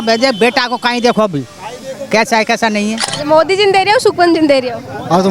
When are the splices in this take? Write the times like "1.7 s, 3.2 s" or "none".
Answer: 3.0 s